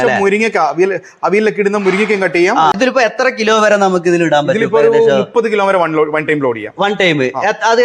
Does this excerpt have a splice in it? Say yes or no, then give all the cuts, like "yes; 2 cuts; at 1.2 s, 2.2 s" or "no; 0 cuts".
yes; 1 cut; at 2.7 s